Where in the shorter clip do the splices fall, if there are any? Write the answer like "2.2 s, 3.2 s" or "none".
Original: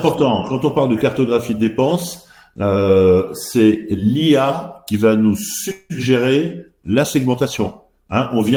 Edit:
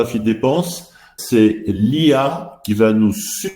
1.1 s

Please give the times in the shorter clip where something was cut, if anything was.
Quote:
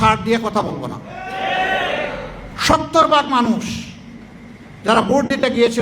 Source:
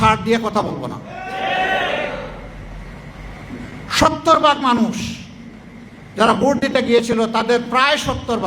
2.5 s

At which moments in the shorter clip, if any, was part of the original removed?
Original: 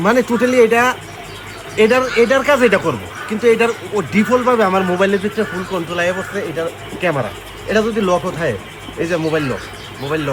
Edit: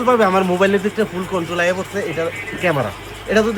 none

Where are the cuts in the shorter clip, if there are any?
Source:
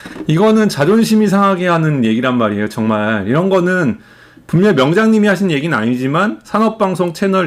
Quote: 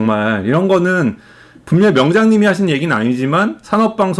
none

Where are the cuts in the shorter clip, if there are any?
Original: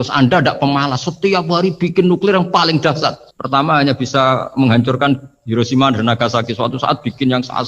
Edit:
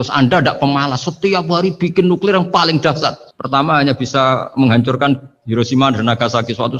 none

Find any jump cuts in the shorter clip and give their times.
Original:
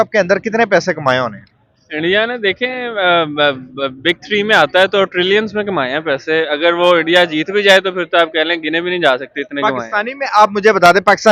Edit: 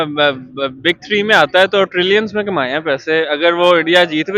none

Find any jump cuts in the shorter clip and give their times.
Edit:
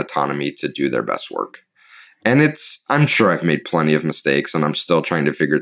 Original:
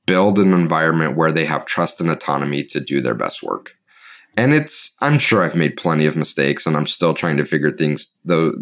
none

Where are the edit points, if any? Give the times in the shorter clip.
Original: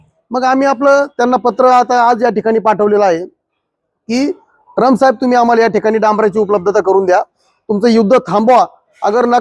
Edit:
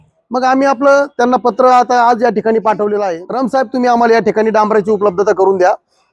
3.2 s

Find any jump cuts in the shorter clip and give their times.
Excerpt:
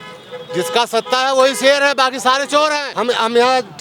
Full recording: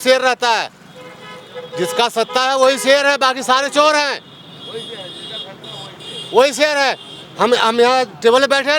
2.9 s

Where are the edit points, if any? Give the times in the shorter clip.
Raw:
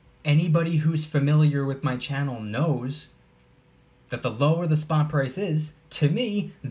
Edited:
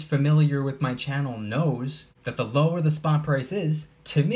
2.1 s

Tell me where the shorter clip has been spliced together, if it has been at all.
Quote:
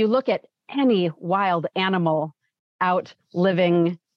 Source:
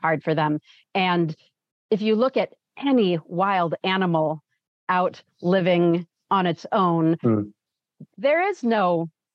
none

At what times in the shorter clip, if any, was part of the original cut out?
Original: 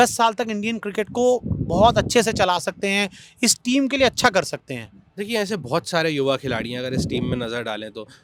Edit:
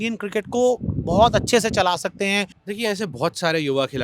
2.6 s

